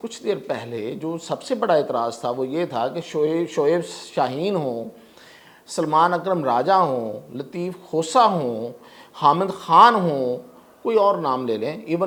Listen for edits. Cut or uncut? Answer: uncut